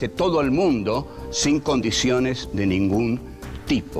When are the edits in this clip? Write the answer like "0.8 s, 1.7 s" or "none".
none